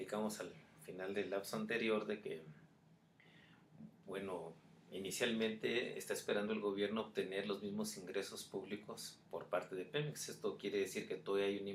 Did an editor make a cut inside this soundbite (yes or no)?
no